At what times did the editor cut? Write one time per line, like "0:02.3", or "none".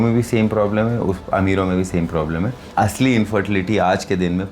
0:02.6